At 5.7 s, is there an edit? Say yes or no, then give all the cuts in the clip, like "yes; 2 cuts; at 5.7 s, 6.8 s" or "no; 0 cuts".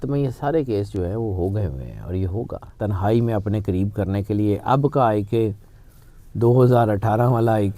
no; 1 cut; at 2.6 s